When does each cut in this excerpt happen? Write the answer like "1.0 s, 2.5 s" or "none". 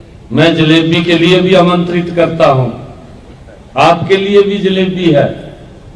none